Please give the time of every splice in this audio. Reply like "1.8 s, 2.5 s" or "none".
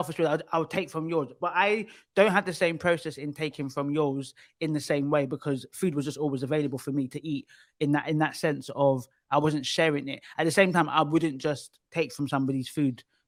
none